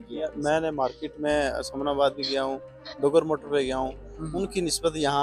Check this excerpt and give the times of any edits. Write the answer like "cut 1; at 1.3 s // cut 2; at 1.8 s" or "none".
none